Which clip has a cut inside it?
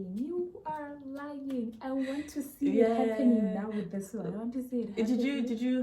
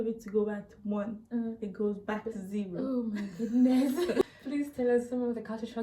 second; 1 cut; at 3.9 s

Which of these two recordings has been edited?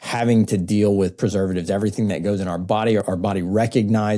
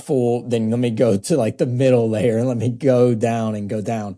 first; 1 cut; at 3.0 s

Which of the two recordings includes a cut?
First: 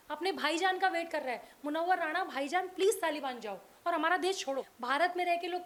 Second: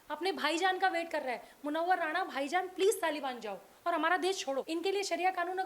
second; 1 cut; at 4.7 s

